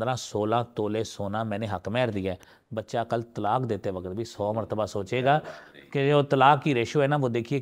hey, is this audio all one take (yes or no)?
yes